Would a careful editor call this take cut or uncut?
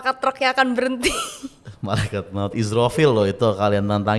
uncut